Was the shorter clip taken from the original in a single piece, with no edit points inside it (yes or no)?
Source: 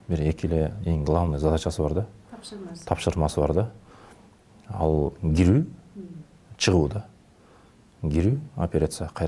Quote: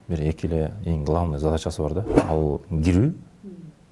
no